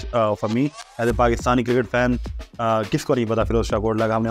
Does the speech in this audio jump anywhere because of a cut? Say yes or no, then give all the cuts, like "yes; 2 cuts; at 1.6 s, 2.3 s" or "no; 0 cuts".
yes; 1 cut; at 0.9 s